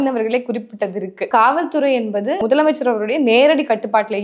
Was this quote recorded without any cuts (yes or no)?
no